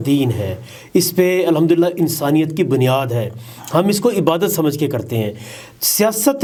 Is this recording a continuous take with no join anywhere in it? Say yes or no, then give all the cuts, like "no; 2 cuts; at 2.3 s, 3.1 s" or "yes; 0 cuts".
yes; 0 cuts